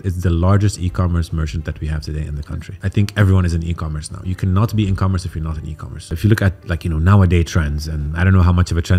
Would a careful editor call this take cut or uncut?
cut